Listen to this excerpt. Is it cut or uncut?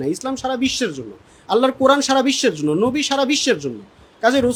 uncut